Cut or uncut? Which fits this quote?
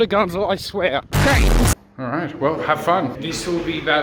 cut